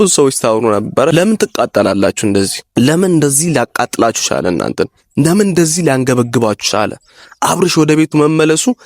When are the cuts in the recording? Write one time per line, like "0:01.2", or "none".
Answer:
0:01.1
0:02.6

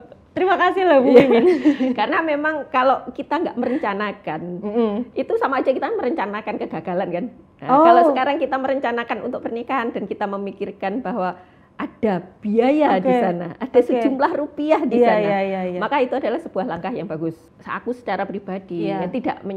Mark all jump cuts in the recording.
0:17.4

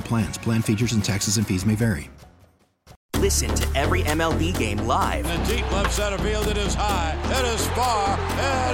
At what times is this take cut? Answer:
0:03.0

